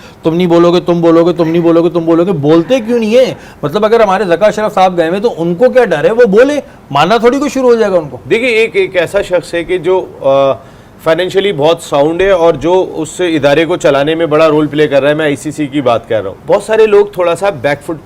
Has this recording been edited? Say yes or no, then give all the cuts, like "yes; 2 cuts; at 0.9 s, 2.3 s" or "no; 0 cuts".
no; 0 cuts